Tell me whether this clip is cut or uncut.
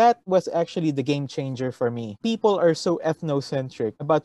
cut